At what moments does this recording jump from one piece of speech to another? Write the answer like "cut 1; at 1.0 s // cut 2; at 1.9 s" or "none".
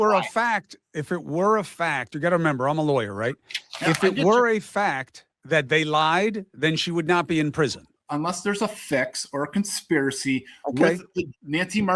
cut 1; at 7.9 s